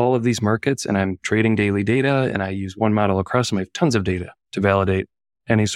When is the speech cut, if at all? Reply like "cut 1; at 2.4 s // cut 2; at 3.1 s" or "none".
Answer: none

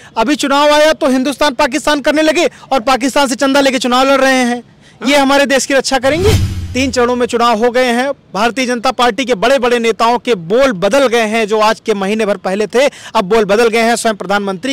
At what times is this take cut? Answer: cut 1; at 6.6 s

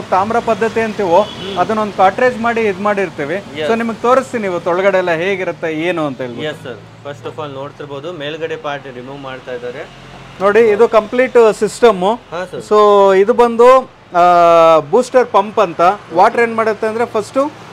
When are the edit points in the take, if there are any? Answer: none

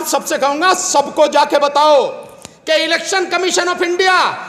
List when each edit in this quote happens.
none

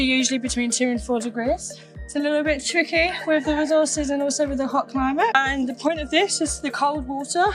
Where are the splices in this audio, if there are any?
none

